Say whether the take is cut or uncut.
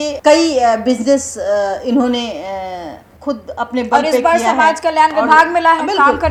uncut